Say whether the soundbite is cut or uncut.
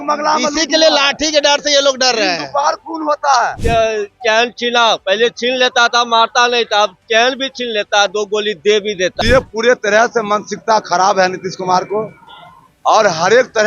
cut